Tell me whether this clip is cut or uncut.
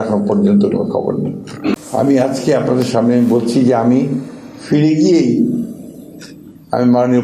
cut